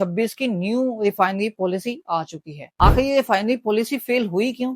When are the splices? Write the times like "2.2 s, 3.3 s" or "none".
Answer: 2.7 s